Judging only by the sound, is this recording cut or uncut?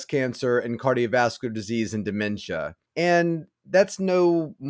cut